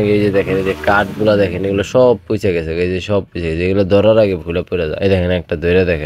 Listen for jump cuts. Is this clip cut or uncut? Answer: uncut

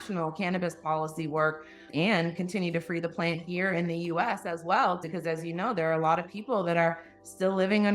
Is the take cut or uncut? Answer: cut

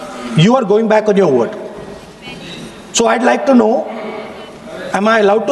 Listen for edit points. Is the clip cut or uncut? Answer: uncut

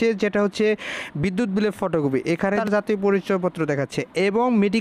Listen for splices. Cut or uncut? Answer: cut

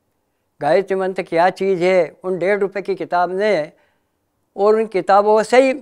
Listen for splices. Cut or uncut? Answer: uncut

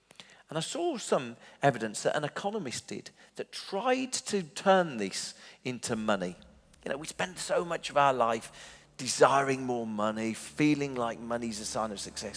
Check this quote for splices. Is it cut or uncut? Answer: uncut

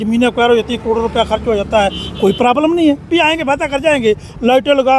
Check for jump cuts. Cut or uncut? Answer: cut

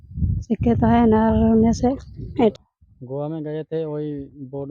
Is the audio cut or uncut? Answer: cut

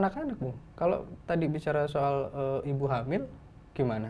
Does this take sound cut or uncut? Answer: uncut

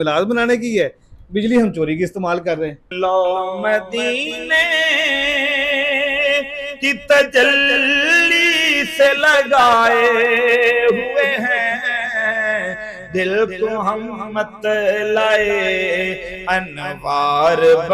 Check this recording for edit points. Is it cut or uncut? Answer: cut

